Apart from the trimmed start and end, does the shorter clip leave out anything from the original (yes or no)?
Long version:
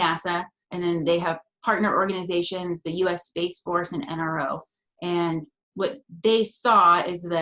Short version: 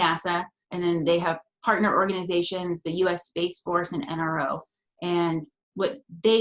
no